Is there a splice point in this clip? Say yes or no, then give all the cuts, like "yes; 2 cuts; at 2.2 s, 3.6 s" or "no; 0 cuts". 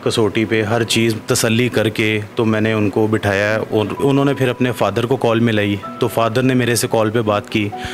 no; 0 cuts